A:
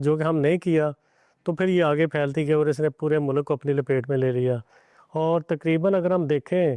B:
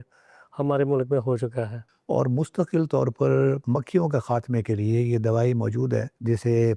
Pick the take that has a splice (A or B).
B